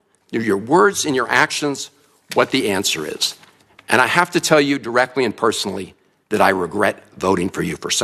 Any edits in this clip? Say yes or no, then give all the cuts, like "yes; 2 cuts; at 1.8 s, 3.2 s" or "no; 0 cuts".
no; 0 cuts